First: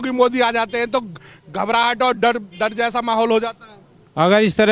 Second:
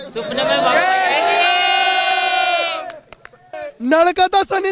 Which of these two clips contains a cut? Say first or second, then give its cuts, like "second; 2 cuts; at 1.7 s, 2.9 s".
second; 1 cut; at 3.6 s